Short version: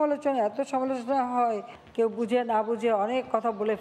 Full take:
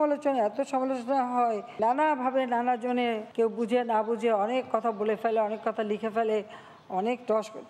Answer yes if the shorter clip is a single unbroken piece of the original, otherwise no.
no